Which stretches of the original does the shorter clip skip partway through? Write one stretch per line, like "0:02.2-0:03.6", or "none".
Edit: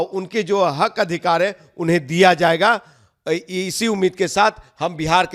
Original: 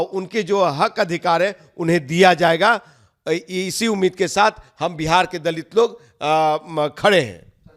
none